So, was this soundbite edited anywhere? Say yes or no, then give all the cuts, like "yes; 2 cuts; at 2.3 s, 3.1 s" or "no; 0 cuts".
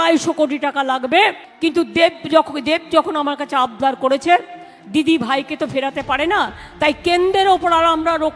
yes; 1 cut; at 1.5 s